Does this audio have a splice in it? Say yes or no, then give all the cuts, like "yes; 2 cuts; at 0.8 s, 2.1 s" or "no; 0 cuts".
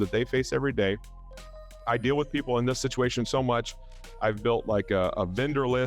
no; 0 cuts